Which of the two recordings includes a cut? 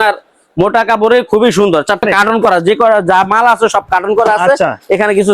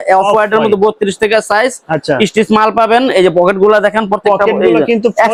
first; 1 cut; at 2.0 s

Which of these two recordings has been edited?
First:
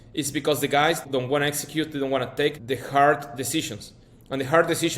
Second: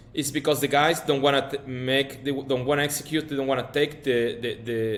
first; 2 cuts; at 1.0 s, 2.6 s

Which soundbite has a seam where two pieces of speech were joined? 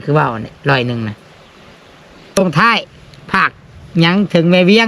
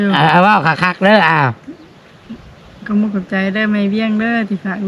first; 1 cut; at 2.4 s

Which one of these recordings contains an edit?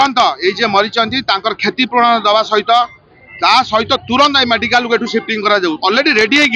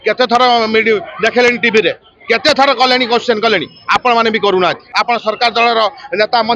second; 1 cut; at 4.8 s

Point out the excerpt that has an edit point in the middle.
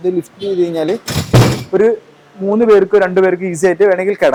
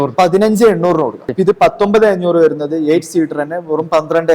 second; 1 cut; at 1.2 s

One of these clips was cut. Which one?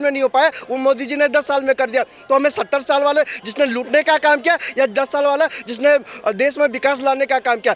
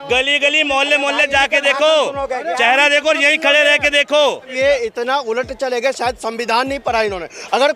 second; 1 cut; at 4.4 s

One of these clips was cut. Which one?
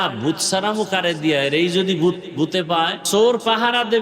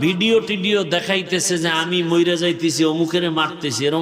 first; 1 cut; at 3.0 s

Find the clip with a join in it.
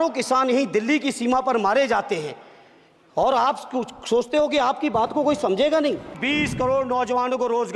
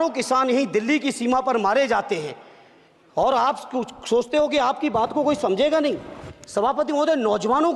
first; 1 cut; at 6.2 s

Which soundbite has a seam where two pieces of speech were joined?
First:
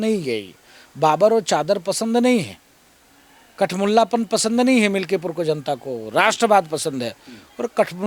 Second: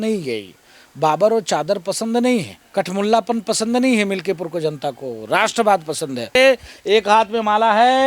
second; 2 cuts; at 2.6 s, 6.3 s

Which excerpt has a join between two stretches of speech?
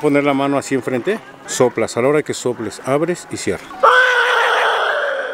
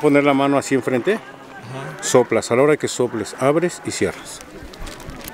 first; 2 cuts; at 1.4 s, 3.7 s

